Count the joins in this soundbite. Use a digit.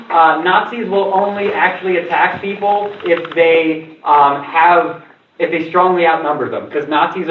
0